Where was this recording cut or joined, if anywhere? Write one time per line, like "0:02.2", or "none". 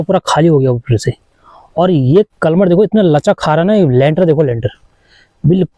none